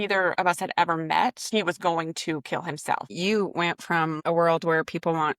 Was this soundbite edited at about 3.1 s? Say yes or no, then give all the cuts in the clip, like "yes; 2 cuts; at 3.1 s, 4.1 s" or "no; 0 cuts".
yes; 3 cuts; at 1.4 s, 3.1 s, 4.2 s